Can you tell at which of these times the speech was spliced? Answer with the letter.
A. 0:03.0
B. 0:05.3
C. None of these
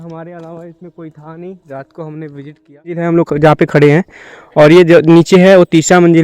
A